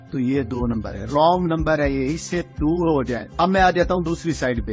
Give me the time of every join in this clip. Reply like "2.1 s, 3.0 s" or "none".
3.2 s